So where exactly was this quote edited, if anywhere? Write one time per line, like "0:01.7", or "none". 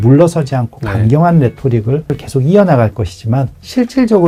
none